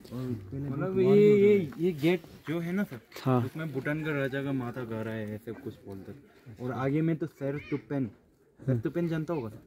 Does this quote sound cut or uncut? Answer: uncut